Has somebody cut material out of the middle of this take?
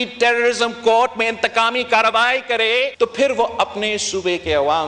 yes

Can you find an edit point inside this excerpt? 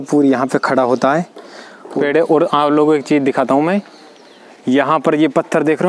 yes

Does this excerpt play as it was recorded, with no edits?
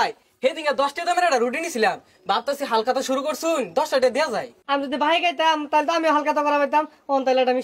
no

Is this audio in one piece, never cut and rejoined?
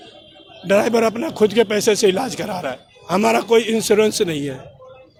yes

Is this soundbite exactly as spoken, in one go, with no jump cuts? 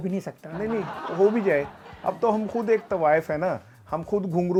yes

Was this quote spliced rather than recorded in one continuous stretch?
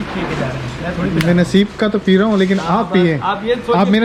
no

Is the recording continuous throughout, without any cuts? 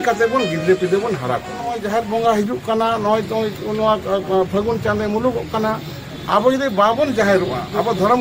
no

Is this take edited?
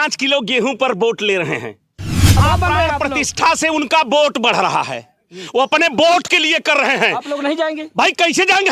yes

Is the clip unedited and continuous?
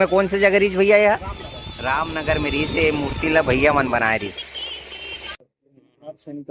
no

